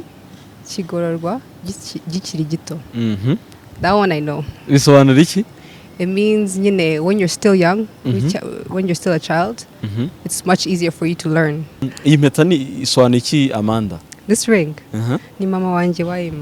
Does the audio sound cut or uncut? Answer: cut